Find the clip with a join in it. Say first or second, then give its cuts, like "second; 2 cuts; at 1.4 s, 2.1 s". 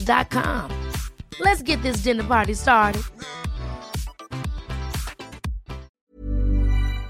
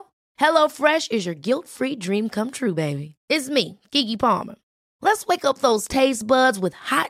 first; 1 cut; at 5.9 s